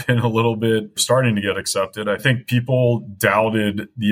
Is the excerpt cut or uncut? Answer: cut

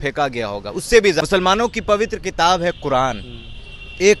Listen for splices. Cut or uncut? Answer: cut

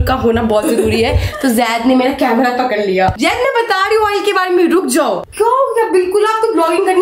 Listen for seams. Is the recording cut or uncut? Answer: cut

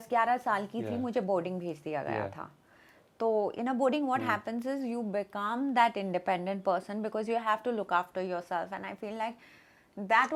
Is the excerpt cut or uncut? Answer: uncut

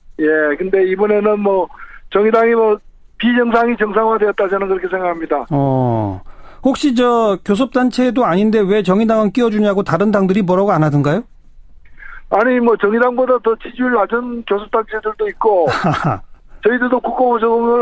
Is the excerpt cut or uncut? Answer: uncut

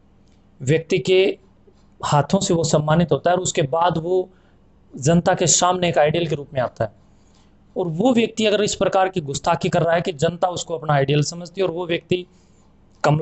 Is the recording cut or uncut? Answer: uncut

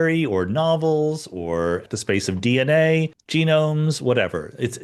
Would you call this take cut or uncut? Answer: cut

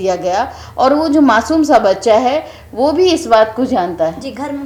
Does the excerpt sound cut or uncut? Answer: uncut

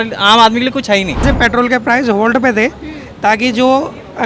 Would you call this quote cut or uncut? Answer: cut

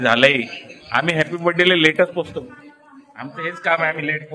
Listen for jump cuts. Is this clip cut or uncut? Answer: uncut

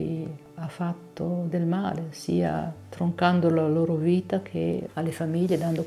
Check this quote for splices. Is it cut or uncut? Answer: uncut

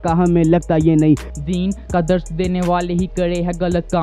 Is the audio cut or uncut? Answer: cut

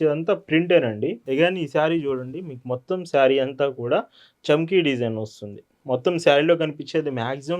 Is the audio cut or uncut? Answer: cut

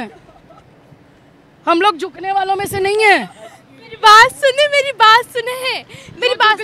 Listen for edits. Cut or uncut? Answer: uncut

